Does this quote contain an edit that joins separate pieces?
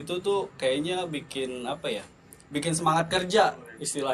no; 0 cuts

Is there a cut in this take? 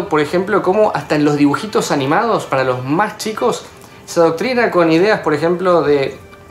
no; 0 cuts

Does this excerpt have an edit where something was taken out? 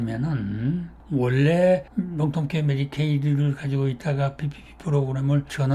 no; 0 cuts

